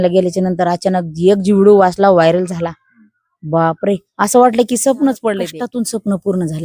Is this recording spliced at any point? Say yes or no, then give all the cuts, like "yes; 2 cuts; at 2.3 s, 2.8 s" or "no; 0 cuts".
yes; 1 cut; at 5.5 s